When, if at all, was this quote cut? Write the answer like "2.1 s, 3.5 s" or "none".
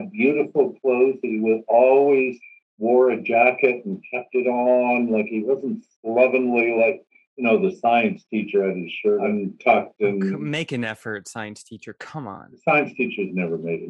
9.2 s, 10.4 s

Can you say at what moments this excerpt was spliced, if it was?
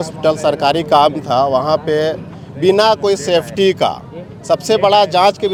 none

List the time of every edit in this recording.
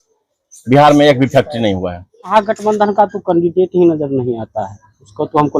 2.3 s

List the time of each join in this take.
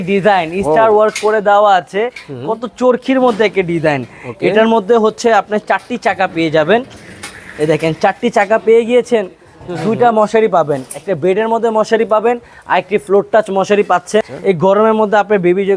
14.3 s

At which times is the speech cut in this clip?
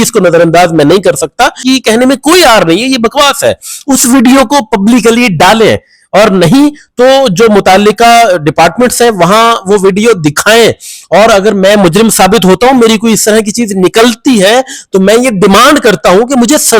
1.6 s

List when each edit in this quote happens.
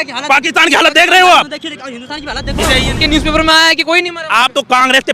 3.0 s

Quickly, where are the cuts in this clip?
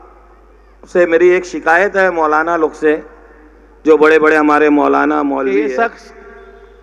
5.4 s

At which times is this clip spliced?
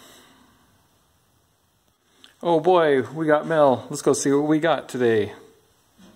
1.9 s

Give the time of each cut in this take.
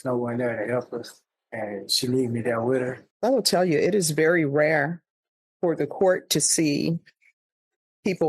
3.0 s

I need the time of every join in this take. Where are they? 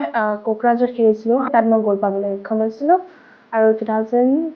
1.5 s

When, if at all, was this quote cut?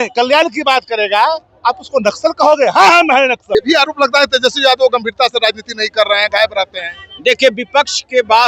3.5 s

